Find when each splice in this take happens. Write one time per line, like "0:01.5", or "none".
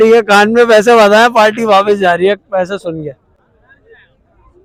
none